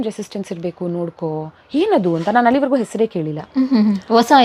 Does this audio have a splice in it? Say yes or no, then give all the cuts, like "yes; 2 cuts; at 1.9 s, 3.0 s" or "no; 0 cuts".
no; 0 cuts